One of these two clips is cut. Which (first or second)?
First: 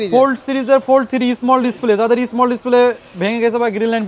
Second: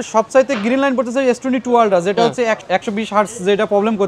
second